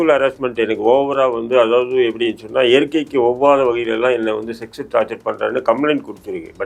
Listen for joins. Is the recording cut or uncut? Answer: uncut